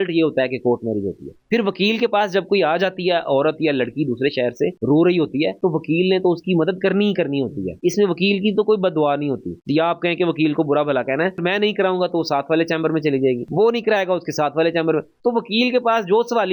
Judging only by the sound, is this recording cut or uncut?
uncut